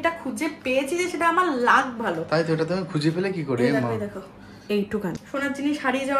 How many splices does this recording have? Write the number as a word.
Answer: one